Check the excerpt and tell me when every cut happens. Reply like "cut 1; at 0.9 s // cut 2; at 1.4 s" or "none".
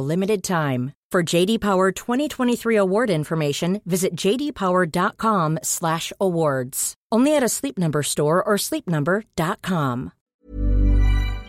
cut 1; at 10.2 s